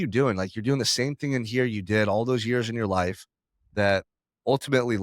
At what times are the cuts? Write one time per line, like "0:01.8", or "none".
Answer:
none